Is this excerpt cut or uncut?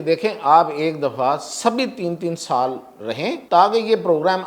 cut